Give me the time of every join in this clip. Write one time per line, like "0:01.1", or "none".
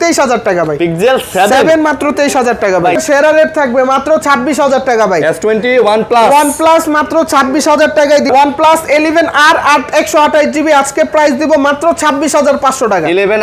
0:03.0
0:08.3